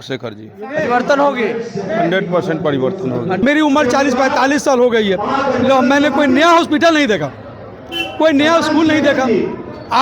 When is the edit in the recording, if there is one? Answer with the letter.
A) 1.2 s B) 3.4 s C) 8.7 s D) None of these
B